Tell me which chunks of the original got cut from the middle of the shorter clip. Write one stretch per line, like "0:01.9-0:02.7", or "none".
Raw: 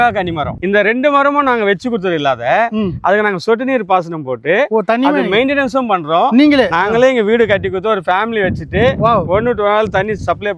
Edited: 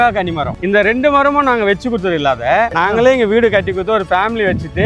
0:02.7-0:06.7